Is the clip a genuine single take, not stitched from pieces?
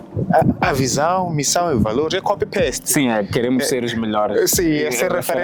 yes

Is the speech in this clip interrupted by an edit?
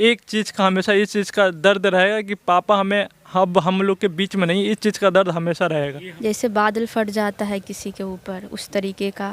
yes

